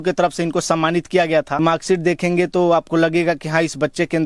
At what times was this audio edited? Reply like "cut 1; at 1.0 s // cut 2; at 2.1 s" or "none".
cut 1; at 1.6 s